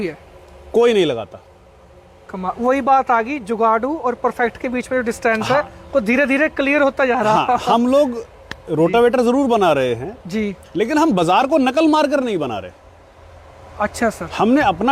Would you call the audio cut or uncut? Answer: uncut